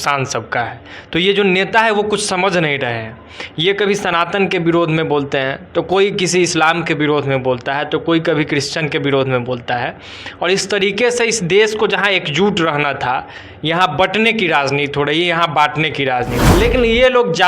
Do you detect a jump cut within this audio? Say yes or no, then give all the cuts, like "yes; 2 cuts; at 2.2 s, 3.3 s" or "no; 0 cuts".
yes; 1 cut; at 16.4 s